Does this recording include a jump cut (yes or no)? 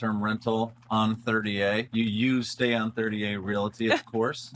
yes